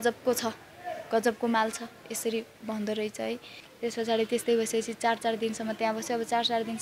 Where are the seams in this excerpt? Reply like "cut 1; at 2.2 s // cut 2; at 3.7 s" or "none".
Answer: cut 1; at 3.6 s